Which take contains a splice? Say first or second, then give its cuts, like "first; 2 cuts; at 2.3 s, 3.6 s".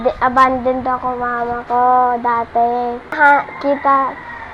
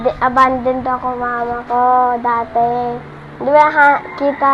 first; 1 cut; at 3.2 s